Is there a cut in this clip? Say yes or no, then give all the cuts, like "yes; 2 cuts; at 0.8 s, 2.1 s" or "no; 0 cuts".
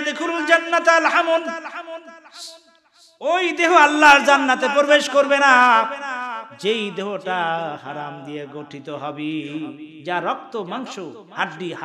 no; 0 cuts